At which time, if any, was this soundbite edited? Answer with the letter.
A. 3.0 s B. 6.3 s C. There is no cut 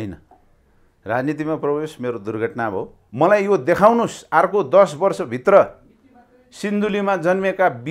A